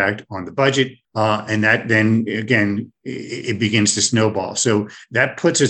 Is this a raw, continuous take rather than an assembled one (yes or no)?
no